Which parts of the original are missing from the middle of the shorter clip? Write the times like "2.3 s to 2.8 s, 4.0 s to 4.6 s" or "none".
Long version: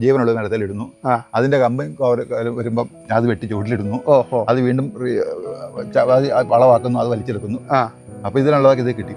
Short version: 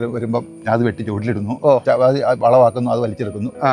4.3 s to 5.9 s